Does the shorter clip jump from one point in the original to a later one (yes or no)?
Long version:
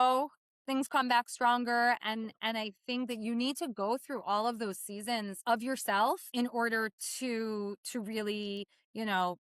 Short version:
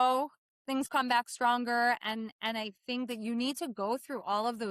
no